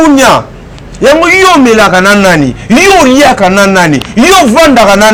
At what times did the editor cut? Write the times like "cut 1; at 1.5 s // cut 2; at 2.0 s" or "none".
none